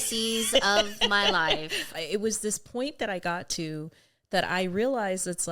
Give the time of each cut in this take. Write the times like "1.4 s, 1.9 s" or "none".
1.9 s